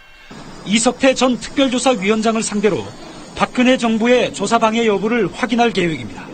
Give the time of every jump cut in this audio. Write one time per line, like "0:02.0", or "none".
0:03.5